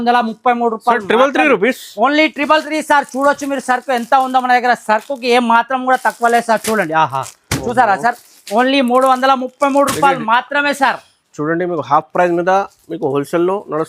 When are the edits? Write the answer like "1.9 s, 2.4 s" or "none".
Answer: none

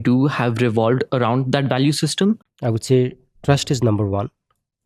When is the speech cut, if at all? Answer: 2.5 s

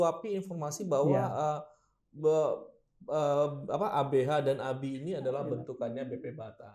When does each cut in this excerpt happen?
none

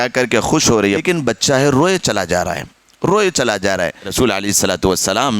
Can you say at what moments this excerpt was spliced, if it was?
1.0 s, 4.1 s

